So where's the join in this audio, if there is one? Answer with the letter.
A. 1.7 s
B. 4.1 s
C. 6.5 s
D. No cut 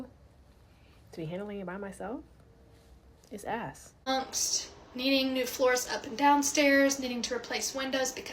B